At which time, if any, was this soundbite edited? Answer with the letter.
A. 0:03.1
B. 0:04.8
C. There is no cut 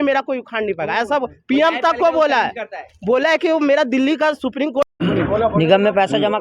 B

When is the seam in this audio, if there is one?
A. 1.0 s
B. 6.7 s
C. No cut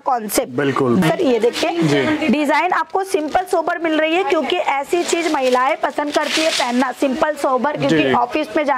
A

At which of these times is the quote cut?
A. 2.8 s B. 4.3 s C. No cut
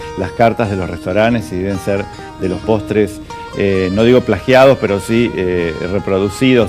B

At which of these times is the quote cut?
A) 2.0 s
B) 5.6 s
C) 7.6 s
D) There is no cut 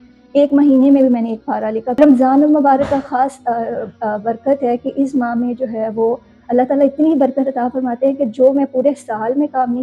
A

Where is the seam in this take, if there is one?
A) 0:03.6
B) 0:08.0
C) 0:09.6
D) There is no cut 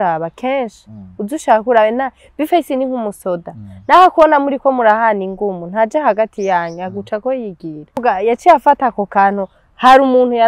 B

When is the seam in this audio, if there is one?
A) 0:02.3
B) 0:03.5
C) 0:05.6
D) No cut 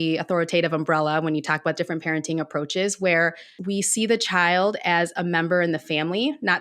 B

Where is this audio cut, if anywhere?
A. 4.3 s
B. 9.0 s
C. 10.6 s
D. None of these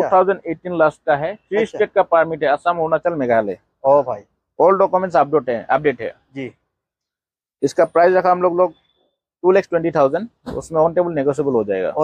D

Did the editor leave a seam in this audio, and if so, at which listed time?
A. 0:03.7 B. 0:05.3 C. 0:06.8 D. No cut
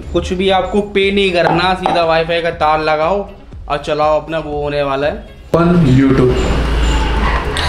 B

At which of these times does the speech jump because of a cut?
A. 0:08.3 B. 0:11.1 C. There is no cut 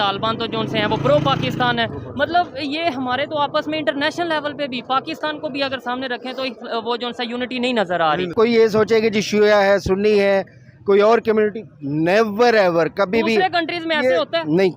A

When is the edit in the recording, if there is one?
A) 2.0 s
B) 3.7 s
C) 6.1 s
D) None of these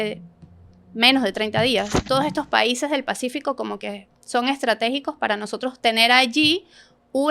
A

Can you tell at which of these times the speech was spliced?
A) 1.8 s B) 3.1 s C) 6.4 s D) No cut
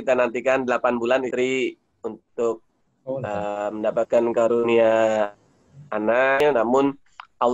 C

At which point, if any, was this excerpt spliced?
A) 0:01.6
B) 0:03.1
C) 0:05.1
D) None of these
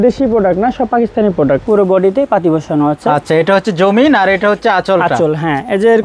A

